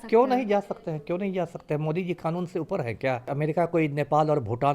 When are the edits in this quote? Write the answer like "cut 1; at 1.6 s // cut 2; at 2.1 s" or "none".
cut 1; at 3.3 s